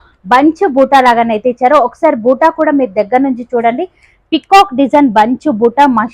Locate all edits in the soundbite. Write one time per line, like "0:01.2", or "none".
none